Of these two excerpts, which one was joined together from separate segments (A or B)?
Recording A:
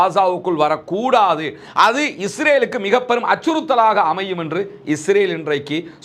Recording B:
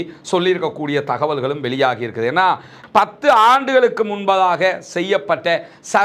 B